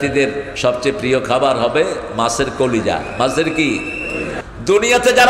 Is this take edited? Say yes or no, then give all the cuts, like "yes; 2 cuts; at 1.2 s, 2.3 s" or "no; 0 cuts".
yes; 1 cut; at 4.4 s